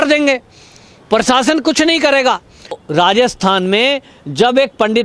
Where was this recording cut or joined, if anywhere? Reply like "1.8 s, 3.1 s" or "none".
2.8 s